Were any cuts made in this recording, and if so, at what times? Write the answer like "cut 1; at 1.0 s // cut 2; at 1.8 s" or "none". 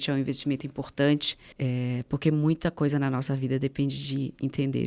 cut 1; at 1.3 s